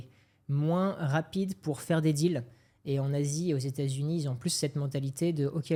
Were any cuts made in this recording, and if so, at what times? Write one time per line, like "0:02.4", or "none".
none